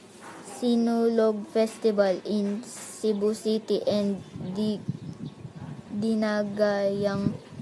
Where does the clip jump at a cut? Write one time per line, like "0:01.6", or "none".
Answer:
none